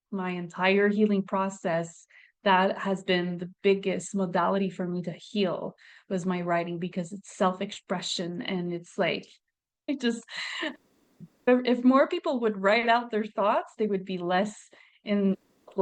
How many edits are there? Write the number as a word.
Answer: one